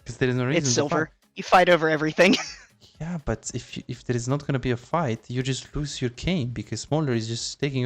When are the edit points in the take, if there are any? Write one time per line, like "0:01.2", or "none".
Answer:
none

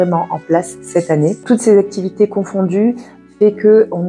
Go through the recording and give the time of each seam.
0:01.4

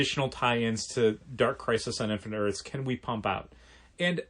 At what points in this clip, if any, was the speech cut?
0:01.3

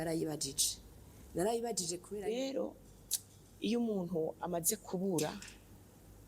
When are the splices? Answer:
0:02.1

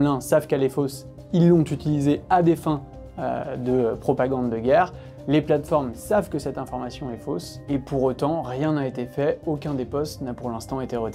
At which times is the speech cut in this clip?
none

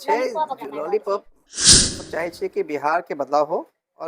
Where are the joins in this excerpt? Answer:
0:01.9

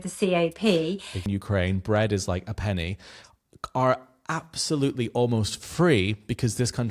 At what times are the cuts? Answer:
0:01.2

